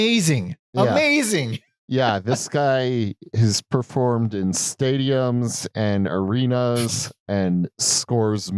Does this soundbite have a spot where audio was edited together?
yes; 1 cut; at 3.2 s

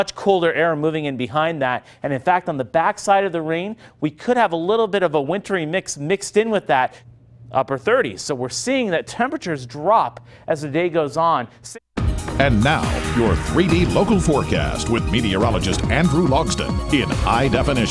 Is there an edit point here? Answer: yes; 2 cuts; at 7.1 s, 11.7 s

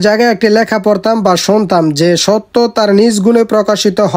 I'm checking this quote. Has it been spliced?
no; 0 cuts

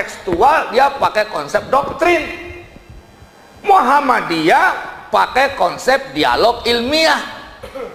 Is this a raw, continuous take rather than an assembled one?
yes; 0 cuts

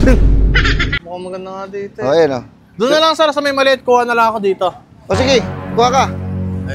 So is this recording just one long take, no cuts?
no; 1 cut; at 1.0 s

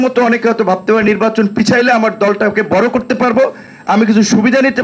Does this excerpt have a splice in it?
no; 0 cuts

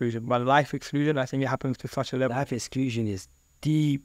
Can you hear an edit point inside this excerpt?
no; 0 cuts

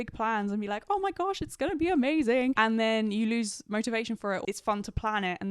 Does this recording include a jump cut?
yes; 2 cuts; at 2.6 s, 4.4 s

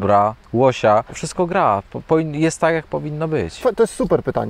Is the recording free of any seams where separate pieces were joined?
no; 2 cuts; at 1.2 s, 3.5 s

